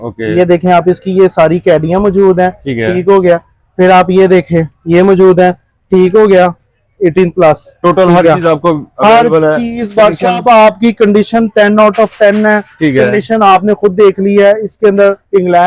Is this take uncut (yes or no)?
yes